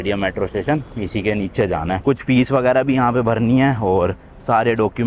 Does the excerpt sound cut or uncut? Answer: uncut